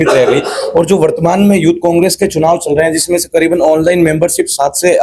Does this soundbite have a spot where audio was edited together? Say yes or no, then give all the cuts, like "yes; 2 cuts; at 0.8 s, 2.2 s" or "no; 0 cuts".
no; 0 cuts